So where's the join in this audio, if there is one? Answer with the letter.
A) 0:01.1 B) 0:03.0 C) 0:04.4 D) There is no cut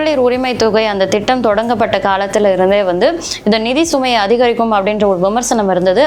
D